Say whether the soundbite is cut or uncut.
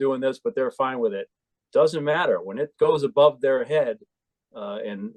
uncut